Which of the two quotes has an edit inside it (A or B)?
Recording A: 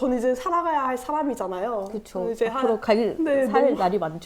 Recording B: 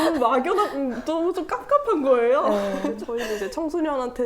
B